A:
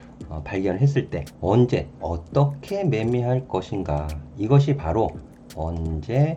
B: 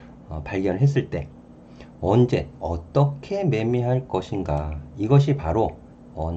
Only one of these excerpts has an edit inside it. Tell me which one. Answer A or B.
A